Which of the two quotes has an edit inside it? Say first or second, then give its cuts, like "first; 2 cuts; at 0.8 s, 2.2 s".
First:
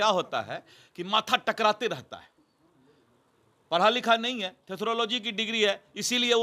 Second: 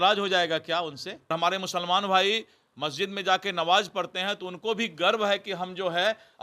second; 1 cut; at 1.3 s